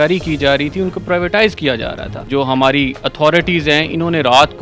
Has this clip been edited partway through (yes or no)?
yes